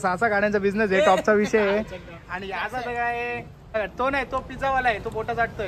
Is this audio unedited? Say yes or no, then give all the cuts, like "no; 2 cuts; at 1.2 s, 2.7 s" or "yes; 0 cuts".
no; 1 cut; at 3.8 s